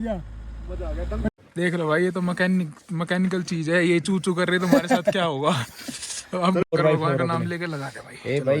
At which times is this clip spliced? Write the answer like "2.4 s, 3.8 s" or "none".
1.4 s, 6.7 s